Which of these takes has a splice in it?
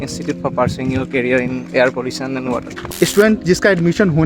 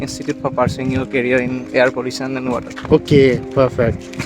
first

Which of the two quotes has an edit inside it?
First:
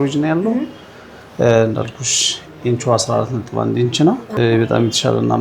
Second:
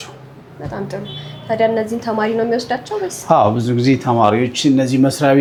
first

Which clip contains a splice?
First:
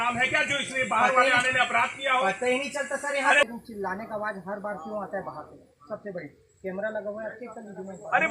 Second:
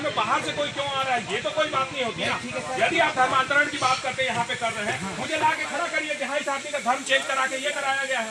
first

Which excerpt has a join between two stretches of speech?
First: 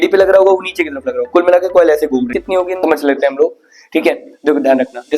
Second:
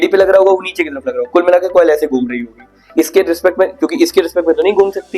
first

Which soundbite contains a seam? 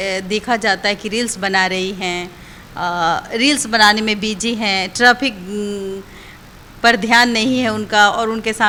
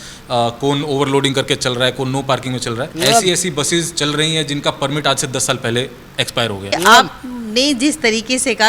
second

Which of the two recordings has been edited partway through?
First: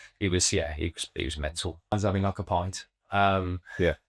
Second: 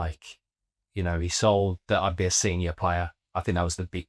first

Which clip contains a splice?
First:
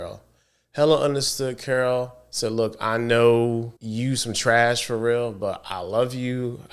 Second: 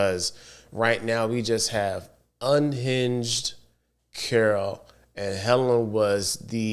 first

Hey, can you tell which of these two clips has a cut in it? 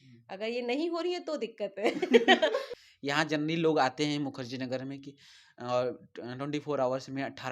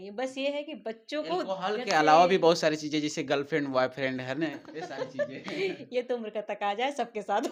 first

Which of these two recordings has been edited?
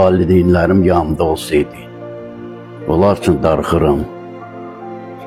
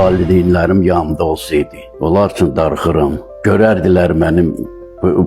second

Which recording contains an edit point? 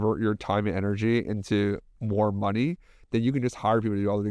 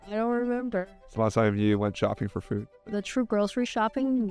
second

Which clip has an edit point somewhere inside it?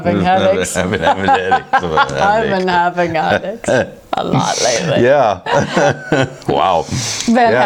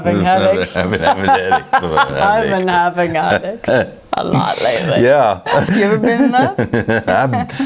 second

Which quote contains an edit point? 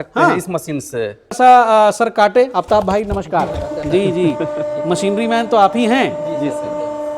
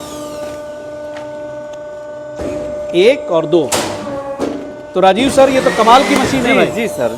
first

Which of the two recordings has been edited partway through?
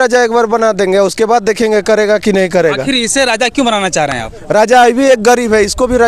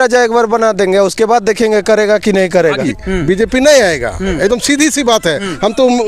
second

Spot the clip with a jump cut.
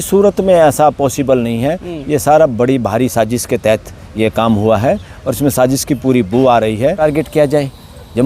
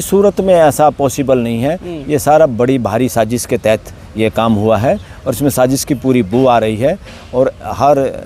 first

